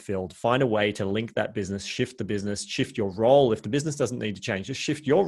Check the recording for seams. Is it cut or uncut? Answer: uncut